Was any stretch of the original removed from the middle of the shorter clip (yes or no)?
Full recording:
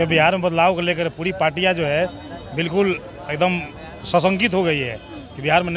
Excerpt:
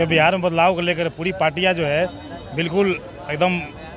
no